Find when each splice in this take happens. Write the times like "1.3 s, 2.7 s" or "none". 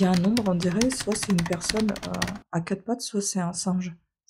none

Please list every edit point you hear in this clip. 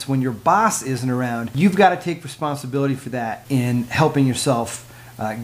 1.4 s, 3.4 s

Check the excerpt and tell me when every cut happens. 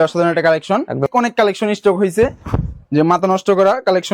1.1 s

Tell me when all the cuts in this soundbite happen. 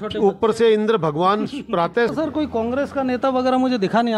2.1 s

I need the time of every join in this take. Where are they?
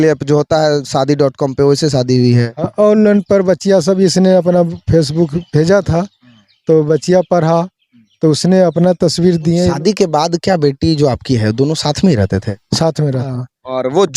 9.7 s, 13.2 s

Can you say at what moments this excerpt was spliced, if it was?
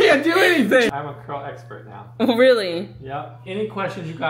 1.0 s, 3.4 s

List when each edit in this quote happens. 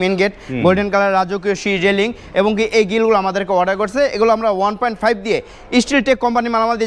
none

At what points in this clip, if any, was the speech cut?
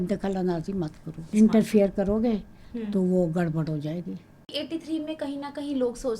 1.2 s, 4.5 s

